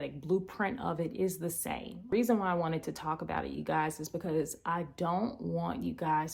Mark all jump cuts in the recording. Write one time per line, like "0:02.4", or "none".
0:02.1

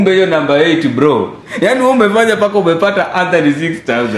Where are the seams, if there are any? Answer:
0:01.4

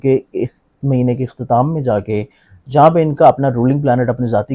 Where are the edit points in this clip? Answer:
none

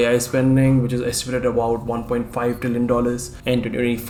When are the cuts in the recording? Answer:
none

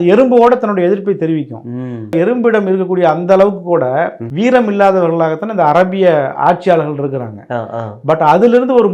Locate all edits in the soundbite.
0:02.2
0:04.2

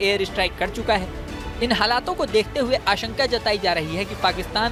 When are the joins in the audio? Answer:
none

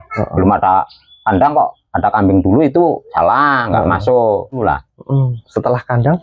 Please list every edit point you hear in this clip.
0:04.6

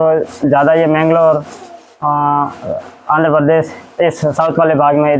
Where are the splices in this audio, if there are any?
none

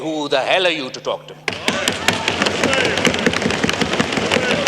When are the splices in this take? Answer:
0:01.4

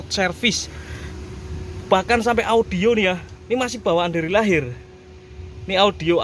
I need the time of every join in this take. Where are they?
none

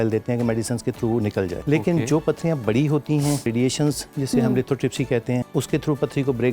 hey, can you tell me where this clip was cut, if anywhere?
0:01.6
0:03.5
0:05.5

